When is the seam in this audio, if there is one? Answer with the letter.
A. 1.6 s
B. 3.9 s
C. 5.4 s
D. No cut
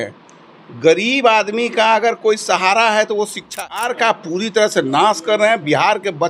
B